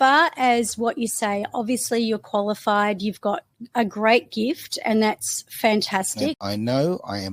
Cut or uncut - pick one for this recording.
cut